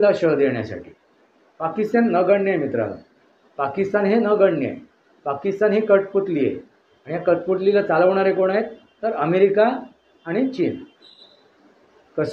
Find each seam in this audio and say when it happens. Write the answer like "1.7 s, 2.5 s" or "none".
11.1 s